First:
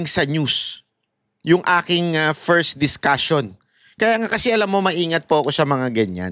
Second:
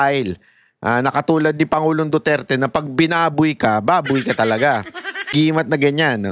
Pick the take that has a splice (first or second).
second